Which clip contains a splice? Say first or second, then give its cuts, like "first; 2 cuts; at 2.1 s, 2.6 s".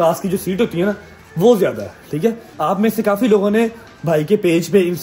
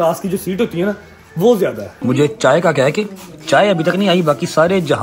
second; 1 cut; at 1.9 s